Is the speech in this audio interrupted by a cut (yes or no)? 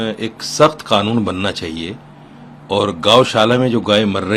no